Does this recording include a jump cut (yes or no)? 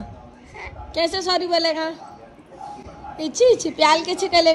no